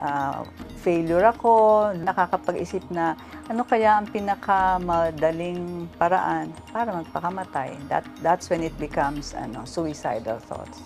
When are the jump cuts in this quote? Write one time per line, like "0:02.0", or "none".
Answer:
none